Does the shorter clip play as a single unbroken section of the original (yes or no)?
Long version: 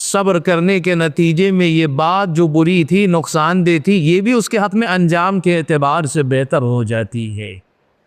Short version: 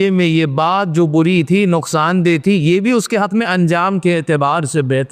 yes